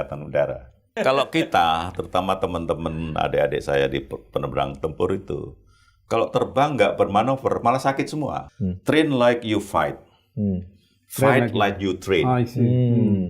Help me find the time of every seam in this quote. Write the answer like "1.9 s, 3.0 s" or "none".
1.0 s, 8.4 s